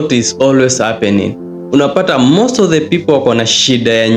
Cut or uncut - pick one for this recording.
uncut